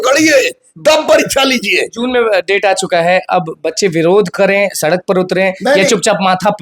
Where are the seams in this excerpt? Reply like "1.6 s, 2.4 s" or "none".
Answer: none